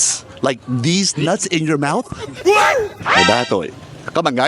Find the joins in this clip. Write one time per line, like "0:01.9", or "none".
0:03.0

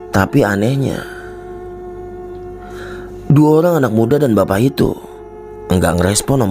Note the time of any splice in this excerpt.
0:01.0
0:03.2

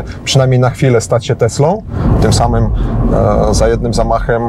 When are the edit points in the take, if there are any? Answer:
0:01.9

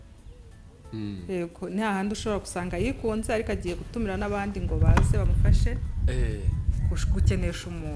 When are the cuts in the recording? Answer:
none

